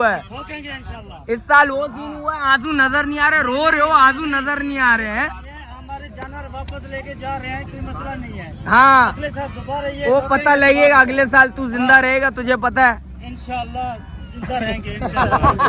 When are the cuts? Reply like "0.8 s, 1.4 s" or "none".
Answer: none